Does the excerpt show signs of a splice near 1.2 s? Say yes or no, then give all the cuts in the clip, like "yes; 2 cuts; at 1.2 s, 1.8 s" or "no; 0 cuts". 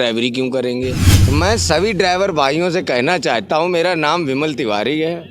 yes; 1 cut; at 1.2 s